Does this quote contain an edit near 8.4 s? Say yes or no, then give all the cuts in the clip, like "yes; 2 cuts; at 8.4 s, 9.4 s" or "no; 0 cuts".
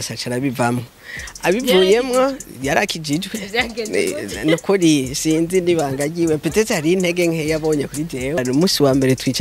yes; 1 cut; at 8.4 s